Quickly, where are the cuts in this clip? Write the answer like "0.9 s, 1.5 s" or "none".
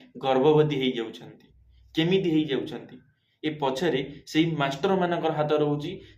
none